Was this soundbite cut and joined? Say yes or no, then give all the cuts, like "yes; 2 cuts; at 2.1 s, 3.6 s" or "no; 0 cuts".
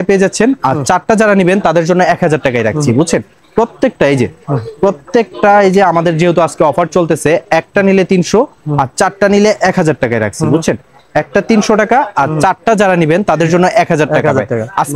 no; 0 cuts